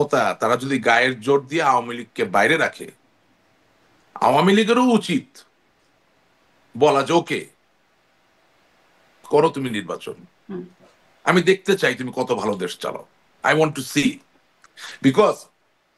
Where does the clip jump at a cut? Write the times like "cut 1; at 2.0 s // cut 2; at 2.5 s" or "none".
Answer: none